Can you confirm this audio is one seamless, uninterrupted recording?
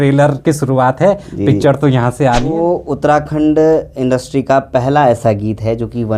no; 1 cut; at 2.6 s

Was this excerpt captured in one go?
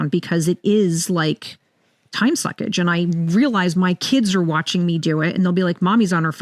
yes; 0 cuts

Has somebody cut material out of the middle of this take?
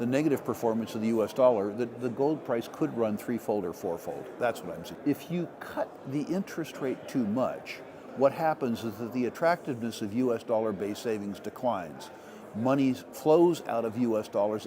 yes; 1 cut; at 4.9 s

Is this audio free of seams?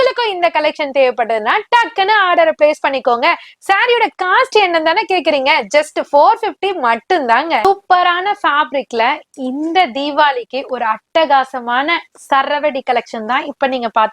no; 1 cut; at 7.6 s

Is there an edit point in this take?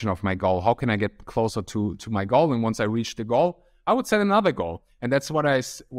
no; 0 cuts

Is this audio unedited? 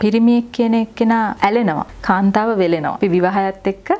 no; 2 cuts; at 1.5 s, 3.0 s

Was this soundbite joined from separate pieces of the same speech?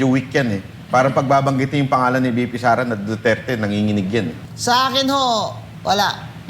yes; 1 cut; at 4.4 s

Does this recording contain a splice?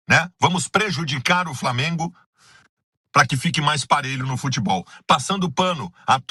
no; 0 cuts

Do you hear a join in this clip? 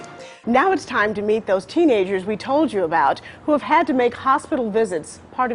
yes; 1 cut; at 2.9 s

